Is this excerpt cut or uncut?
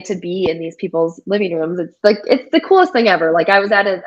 uncut